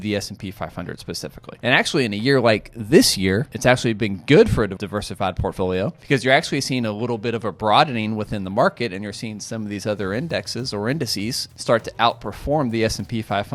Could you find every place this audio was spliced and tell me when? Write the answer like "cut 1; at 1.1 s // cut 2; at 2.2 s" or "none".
cut 1; at 1.5 s // cut 2; at 3.5 s // cut 3; at 4.7 s // cut 4; at 6.0 s // cut 5; at 11.5 s